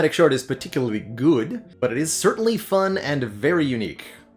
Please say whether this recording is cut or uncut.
cut